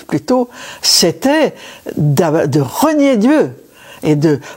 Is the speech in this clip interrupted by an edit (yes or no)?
no